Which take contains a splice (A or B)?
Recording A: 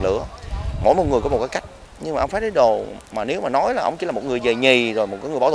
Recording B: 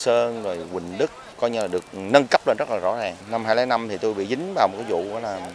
B